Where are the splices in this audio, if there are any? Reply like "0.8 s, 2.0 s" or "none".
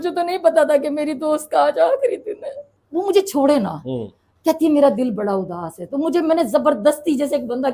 2.7 s